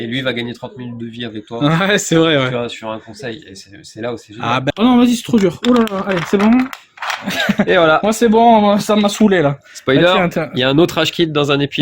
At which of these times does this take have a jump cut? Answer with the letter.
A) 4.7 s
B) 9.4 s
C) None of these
A